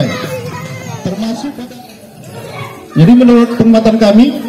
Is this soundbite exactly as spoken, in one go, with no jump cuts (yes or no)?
no